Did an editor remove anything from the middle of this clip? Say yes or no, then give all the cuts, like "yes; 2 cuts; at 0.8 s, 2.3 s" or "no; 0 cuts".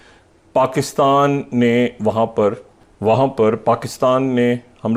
no; 0 cuts